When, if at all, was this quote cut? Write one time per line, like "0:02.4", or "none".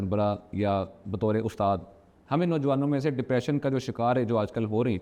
none